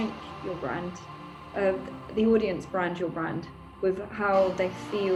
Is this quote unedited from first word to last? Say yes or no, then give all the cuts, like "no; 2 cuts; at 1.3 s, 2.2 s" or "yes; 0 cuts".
yes; 0 cuts